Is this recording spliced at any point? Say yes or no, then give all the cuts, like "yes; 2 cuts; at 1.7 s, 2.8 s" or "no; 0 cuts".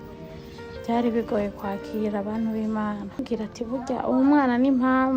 yes; 1 cut; at 3.2 s